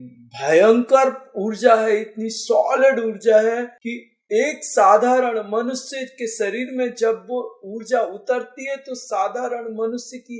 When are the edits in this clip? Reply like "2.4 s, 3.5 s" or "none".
none